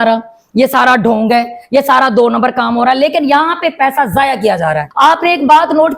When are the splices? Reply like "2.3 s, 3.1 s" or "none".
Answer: 4.9 s